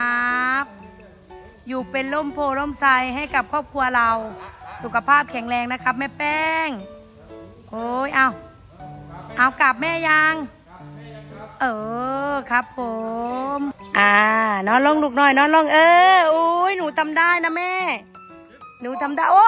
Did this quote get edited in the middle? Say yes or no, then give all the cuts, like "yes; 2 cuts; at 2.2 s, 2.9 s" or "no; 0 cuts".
yes; 1 cut; at 13.8 s